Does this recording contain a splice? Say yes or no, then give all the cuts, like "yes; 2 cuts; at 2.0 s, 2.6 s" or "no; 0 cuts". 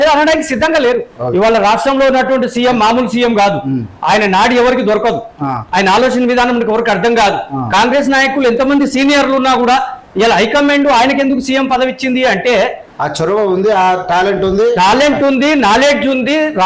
yes; 2 cuts; at 1.1 s, 12.9 s